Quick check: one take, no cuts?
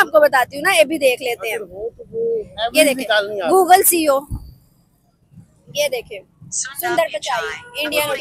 yes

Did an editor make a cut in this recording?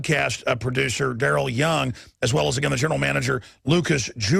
yes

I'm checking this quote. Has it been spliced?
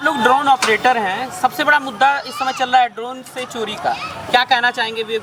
no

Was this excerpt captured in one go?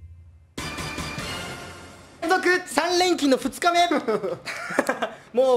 yes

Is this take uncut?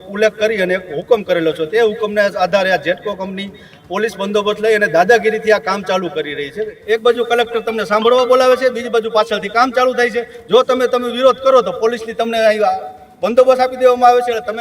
no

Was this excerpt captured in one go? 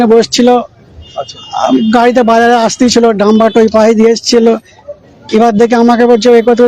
yes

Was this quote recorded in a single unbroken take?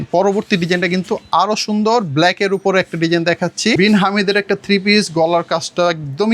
no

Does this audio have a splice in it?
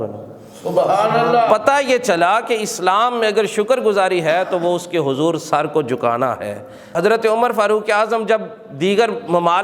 yes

